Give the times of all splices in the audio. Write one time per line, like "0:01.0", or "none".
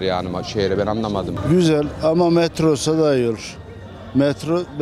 0:01.3